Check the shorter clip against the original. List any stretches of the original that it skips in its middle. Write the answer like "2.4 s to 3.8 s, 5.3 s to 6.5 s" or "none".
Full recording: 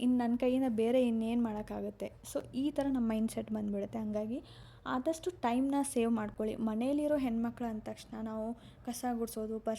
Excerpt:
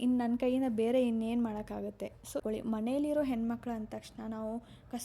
2.4 s to 6.3 s